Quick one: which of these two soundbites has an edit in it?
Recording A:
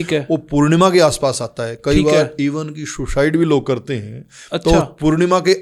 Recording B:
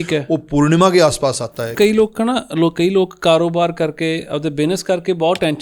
B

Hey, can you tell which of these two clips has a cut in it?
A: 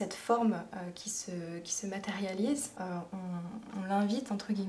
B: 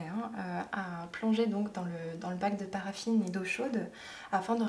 A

